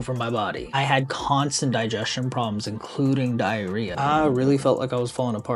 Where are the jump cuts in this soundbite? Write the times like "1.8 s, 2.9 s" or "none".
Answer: 3.9 s